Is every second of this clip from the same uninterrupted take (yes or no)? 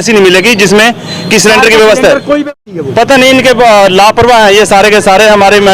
no